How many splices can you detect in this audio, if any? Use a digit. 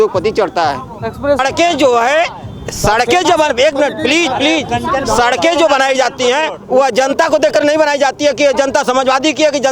1